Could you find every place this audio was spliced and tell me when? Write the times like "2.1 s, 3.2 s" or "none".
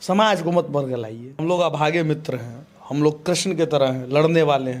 1.4 s